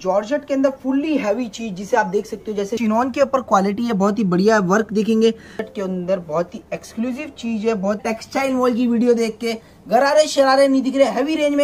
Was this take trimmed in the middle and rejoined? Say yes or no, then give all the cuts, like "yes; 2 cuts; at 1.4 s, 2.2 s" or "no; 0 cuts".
yes; 3 cuts; at 2.7 s, 5.6 s, 8.0 s